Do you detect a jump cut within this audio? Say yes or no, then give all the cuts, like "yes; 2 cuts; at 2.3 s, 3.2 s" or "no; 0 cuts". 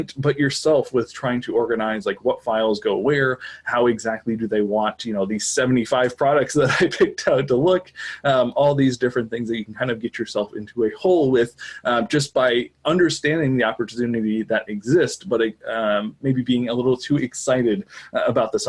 no; 0 cuts